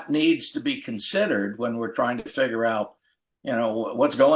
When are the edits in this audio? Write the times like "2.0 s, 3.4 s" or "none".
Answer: none